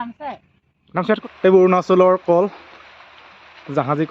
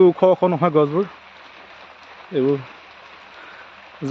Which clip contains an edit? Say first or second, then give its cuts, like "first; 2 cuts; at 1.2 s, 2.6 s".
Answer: first; 1 cut; at 1.2 s